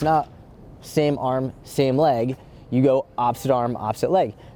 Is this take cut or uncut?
uncut